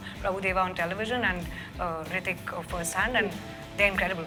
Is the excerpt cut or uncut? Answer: uncut